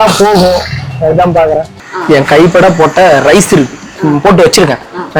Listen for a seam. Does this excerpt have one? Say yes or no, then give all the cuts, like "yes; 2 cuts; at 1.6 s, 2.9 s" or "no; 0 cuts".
yes; 1 cut; at 1.9 s